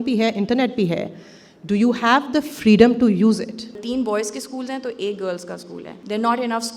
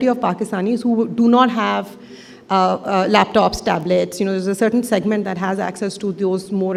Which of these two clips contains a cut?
first; 2 cuts; at 3.8 s, 5.9 s

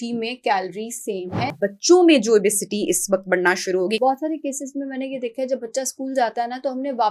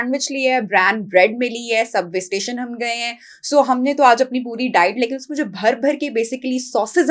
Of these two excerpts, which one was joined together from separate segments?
first; 2 cuts; at 1.5 s, 4.0 s

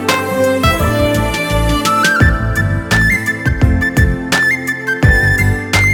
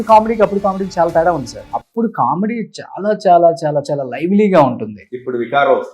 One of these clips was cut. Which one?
second; 1 cut; at 1.6 s

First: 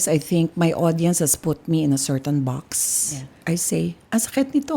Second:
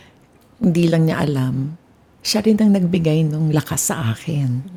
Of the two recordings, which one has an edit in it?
first; 1 cut; at 3.4 s

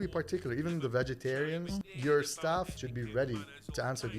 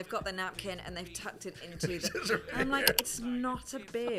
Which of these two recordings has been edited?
first; 2 cuts; at 1.8 s, 2.7 s

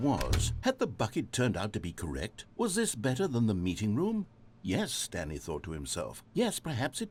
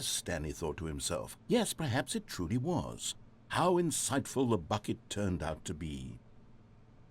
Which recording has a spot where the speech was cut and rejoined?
second; 1 cut; at 6.2 s

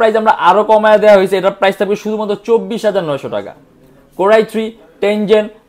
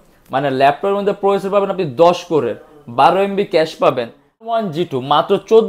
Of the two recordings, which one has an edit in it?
second; 1 cut; at 4.5 s

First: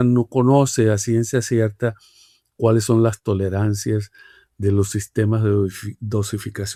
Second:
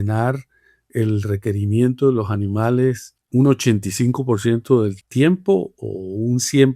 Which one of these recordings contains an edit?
second; 2 cuts; at 3.1 s, 5.0 s

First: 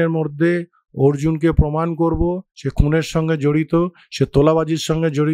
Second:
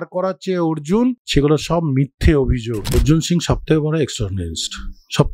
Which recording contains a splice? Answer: second; 2 cuts; at 1.2 s, 2.9 s

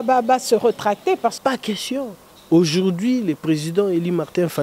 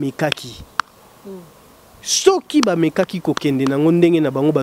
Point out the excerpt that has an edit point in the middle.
first; 1 cut; at 1.4 s

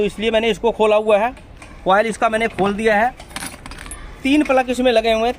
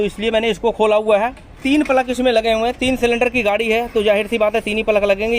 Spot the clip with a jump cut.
second; 1 cut; at 1.5 s

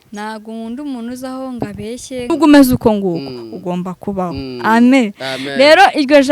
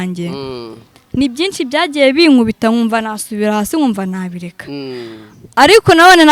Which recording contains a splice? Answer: first; 1 cut; at 2.3 s

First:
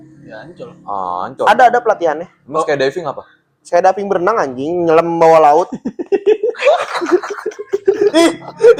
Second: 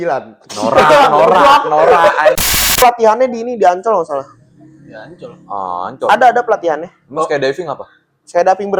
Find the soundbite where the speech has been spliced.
second; 1 cut; at 2.7 s

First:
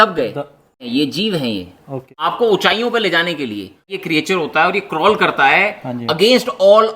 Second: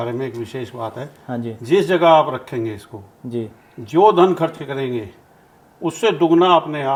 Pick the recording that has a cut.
first; 3 cuts; at 0.9 s, 2.2 s, 3.9 s

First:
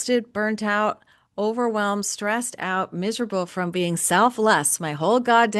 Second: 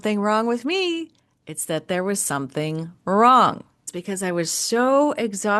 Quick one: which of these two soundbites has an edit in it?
second; 1 cut; at 3.9 s

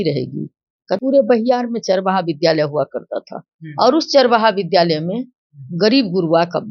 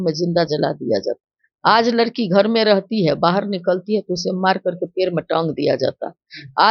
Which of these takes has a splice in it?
first; 1 cut; at 1.0 s

